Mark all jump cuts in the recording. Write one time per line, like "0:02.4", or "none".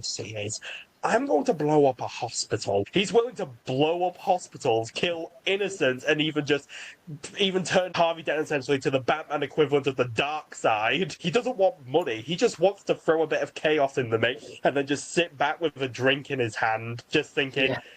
0:02.9
0:07.9
0:11.2